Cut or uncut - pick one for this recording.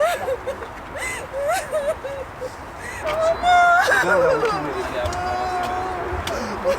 cut